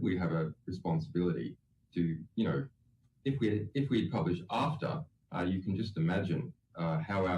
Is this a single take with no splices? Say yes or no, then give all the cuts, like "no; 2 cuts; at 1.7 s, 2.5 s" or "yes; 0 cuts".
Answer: no; 1 cut; at 6.4 s